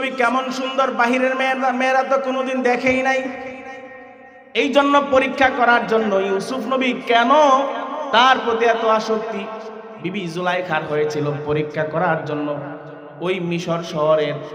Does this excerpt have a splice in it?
no; 0 cuts

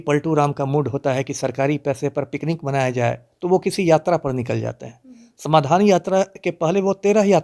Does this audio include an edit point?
no; 0 cuts

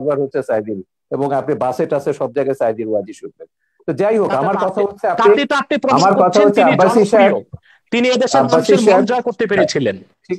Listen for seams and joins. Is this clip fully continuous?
yes; 0 cuts

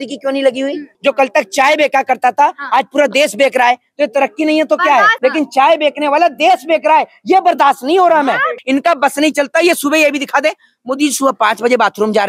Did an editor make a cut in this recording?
yes; 3 cuts; at 0.9 s, 5.1 s, 8.6 s

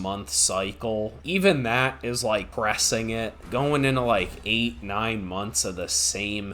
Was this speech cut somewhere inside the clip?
yes; 2 cuts; at 1.2 s, 3.0 s

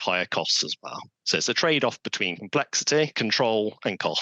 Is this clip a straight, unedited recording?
no; 1 cut; at 3.1 s

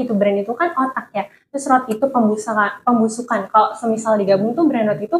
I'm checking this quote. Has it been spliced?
no; 0 cuts

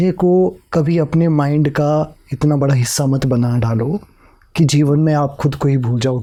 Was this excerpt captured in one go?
yes; 0 cuts

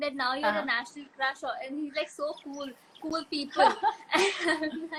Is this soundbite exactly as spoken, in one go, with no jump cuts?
yes; 0 cuts

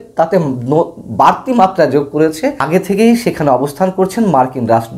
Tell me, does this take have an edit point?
yes; 1 cut; at 2.6 s

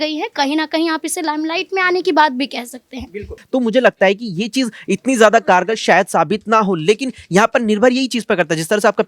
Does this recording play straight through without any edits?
no; 1 cut; at 3.3 s

